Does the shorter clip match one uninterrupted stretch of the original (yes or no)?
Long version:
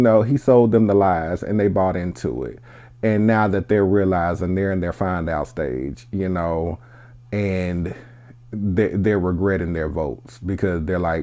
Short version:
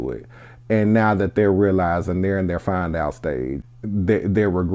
no